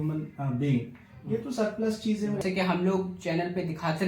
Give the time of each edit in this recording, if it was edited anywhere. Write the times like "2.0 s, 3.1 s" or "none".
2.4 s